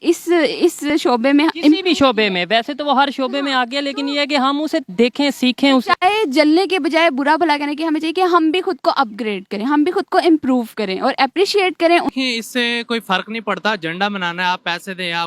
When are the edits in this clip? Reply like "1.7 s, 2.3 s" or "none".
0.9 s, 12.1 s